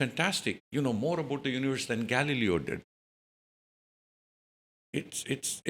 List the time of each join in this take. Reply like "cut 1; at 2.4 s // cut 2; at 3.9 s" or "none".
none